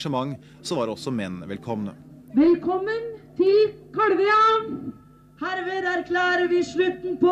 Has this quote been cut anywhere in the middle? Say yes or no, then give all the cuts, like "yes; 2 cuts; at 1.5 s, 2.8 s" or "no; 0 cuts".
yes; 1 cut; at 4.0 s